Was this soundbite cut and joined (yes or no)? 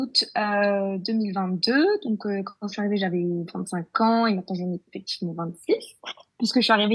no